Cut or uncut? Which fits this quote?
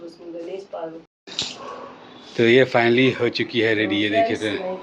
cut